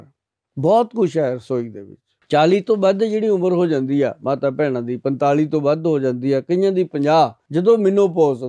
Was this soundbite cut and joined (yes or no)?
yes